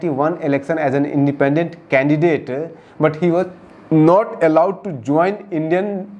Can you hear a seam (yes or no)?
no